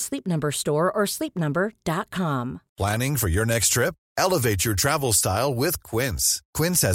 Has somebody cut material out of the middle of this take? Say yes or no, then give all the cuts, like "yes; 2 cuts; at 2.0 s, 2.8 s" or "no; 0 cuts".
yes; 1 cut; at 2.6 s